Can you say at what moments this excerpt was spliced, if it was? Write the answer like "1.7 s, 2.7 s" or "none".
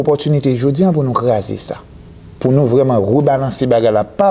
none